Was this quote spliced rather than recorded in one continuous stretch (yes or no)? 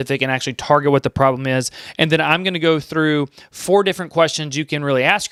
no